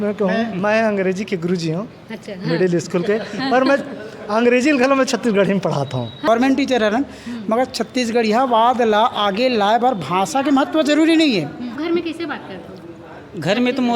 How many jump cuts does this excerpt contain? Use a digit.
2